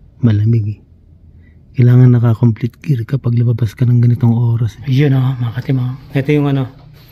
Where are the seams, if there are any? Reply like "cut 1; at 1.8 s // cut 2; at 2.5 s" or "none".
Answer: cut 1; at 4.7 s